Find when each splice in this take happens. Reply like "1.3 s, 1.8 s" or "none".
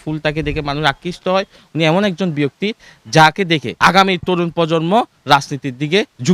3.7 s